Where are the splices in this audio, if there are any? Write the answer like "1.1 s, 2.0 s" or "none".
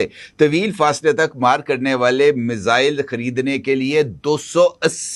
none